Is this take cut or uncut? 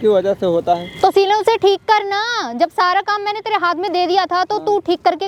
uncut